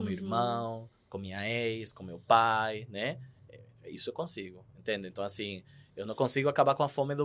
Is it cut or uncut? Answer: uncut